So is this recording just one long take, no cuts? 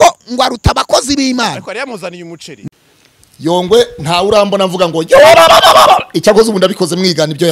no; 1 cut; at 2.7 s

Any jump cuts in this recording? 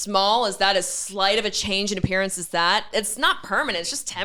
no; 0 cuts

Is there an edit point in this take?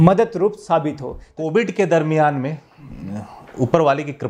yes; 1 cut; at 1.3 s

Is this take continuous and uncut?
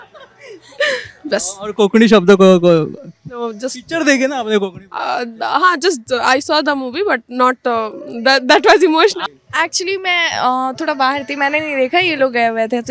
no; 1 cut; at 9.2 s

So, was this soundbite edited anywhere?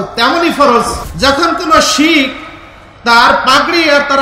yes; 1 cut; at 1.0 s

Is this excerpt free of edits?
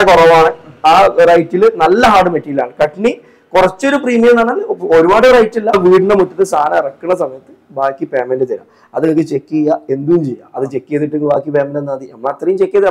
no; 1 cut; at 5.7 s

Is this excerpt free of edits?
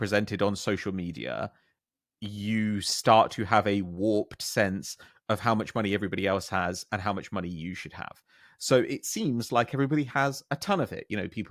yes; 0 cuts

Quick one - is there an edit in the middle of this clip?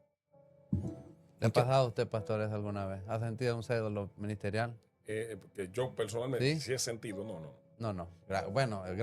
no; 0 cuts

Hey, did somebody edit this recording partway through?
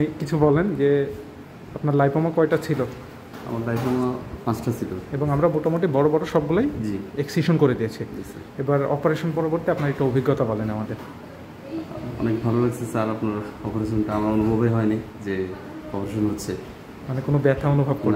no; 0 cuts

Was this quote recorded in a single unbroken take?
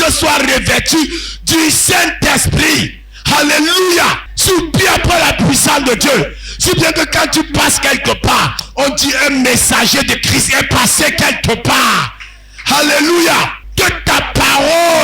no; 2 cuts; at 4.3 s, 13.6 s

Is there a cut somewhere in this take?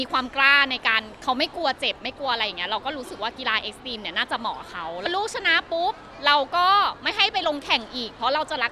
yes; 1 cut; at 5.1 s

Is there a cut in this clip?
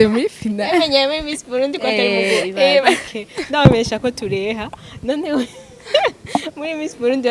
no; 0 cuts

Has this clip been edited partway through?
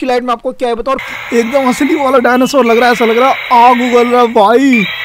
yes; 1 cut; at 1.1 s

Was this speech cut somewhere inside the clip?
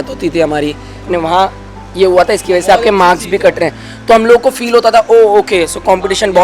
yes; 1 cut; at 1.1 s

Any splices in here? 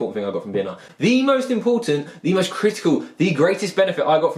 no; 0 cuts

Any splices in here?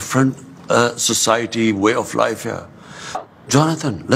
yes; 1 cut; at 3.2 s

